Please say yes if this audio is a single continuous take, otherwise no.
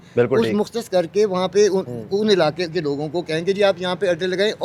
yes